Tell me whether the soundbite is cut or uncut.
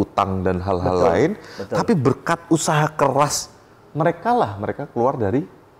uncut